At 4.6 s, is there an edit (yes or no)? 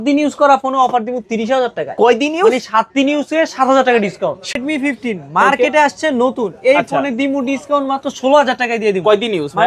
yes